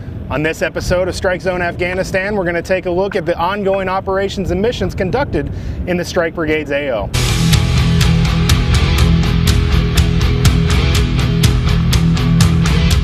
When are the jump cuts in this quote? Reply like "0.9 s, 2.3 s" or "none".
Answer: none